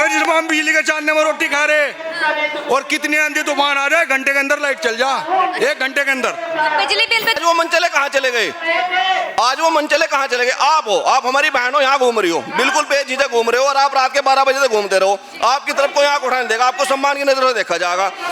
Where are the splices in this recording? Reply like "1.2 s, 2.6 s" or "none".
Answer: 7.4 s